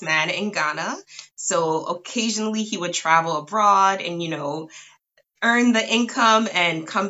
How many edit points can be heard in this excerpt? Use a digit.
0